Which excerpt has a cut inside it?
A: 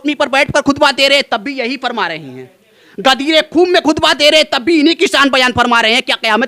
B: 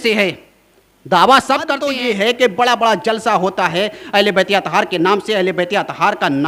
B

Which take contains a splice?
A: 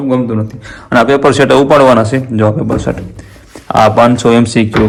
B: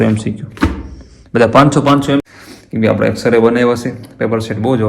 B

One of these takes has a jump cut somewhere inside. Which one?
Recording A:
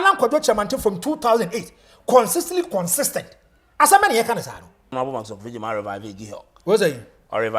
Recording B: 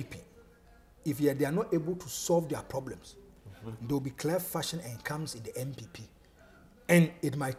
A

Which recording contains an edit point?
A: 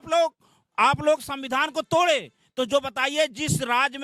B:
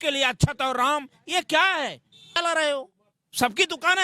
B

